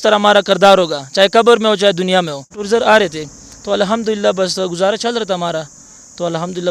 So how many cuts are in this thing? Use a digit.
1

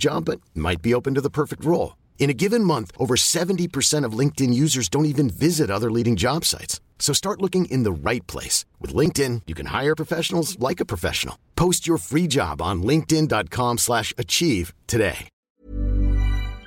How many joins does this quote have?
1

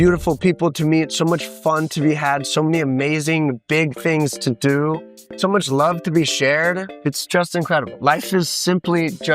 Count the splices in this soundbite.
2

